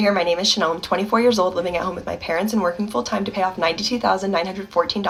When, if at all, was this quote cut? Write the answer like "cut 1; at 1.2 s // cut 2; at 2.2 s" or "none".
none